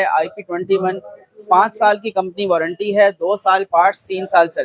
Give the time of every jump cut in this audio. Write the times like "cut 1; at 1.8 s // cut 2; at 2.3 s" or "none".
none